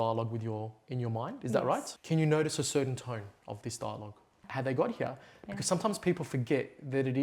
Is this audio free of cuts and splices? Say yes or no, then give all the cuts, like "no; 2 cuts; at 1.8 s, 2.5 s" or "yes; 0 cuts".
no; 2 cuts; at 1.9 s, 4.4 s